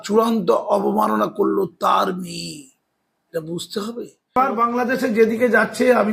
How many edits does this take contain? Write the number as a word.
one